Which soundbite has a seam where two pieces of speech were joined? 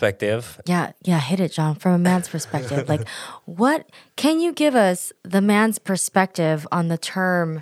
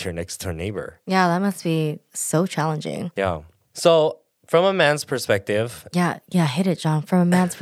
second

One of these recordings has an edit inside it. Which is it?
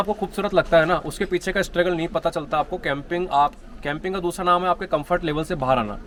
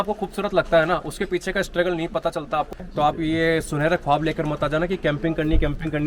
second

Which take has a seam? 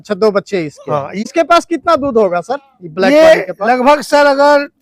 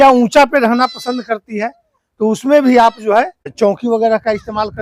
second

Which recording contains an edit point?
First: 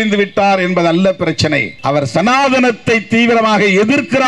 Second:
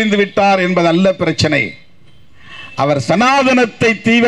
first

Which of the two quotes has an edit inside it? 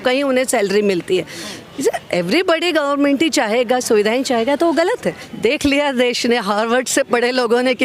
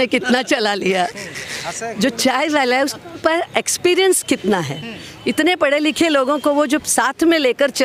first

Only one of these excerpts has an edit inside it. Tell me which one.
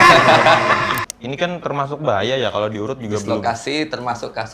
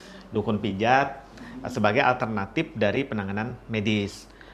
first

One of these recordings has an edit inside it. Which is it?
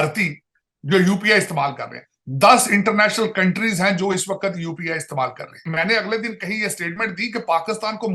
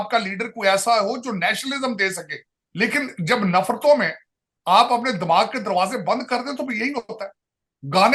first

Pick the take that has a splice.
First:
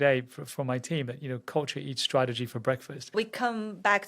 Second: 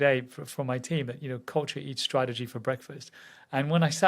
first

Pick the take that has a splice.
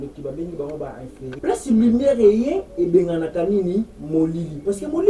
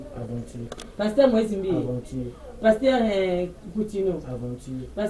first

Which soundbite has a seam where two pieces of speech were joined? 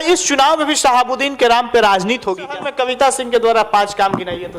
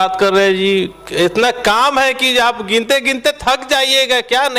first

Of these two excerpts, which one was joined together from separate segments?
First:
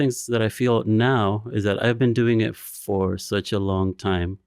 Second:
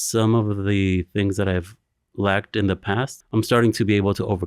second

